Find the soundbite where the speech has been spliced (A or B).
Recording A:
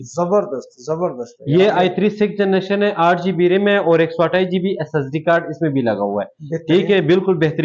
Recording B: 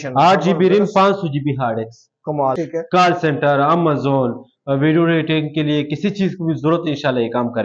B